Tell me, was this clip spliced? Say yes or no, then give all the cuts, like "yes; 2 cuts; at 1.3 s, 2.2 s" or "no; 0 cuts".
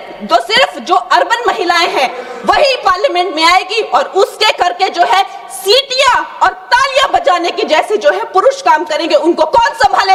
no; 0 cuts